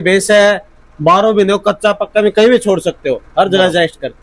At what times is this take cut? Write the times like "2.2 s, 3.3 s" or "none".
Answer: none